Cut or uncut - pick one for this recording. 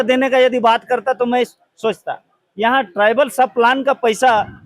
uncut